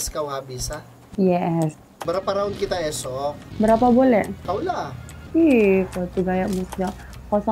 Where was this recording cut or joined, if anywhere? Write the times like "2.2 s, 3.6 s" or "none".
1.9 s